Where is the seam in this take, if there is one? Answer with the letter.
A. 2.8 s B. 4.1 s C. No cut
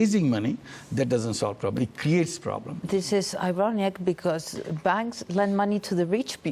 A